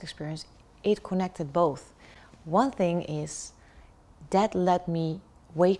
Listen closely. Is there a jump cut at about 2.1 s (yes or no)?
no